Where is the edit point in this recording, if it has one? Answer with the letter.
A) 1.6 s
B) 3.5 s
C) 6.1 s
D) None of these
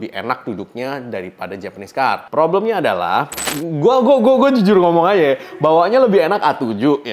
B